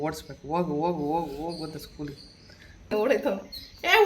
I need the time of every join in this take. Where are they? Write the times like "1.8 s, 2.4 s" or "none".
2.9 s